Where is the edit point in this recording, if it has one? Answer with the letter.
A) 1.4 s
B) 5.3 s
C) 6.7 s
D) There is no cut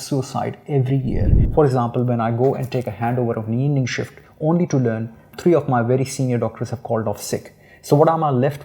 A